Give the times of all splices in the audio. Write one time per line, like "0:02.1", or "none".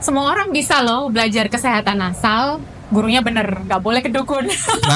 none

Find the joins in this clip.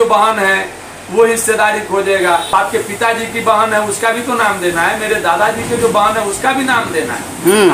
0:02.5

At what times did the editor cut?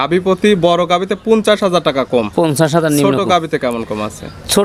none

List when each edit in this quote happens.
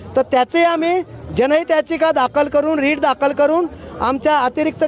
none

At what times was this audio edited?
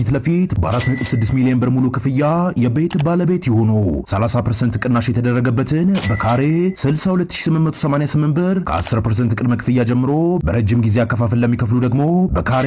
none

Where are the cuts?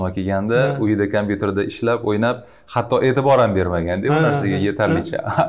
none

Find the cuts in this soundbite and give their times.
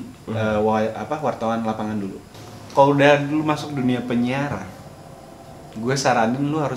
0:02.3

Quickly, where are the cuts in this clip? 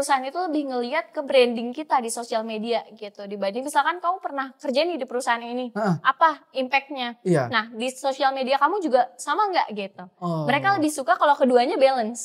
none

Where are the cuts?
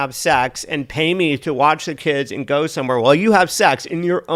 none

